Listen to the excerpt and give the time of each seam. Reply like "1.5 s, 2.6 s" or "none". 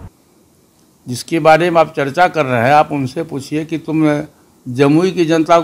none